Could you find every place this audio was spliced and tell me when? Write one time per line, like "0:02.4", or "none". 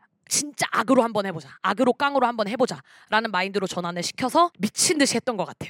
0:04.5